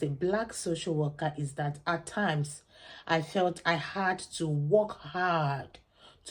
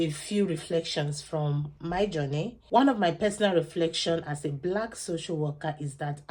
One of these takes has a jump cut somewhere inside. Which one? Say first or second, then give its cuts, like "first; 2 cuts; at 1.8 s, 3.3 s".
second; 1 cut; at 2.6 s